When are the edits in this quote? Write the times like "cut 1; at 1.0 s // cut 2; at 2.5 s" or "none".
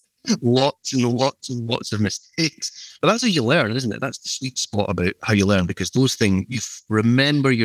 cut 1; at 6.6 s